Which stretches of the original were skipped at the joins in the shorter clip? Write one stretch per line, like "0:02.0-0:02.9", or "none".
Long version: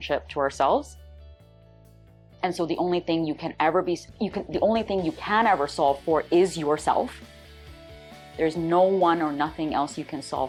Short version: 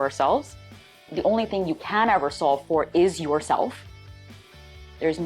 0:01.4-0:04.4